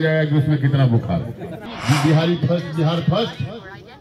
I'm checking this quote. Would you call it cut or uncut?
cut